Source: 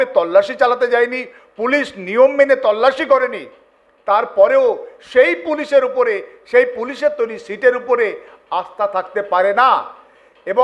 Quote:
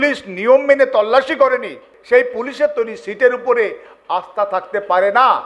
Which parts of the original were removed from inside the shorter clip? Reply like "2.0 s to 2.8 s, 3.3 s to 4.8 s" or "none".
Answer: 3.6 s to 6.3 s